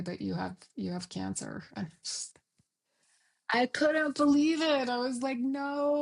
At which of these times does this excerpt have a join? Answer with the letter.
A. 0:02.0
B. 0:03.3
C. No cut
C